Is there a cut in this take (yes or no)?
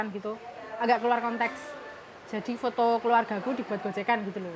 no